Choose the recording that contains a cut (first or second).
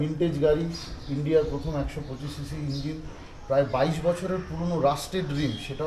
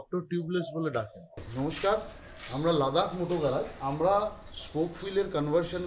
second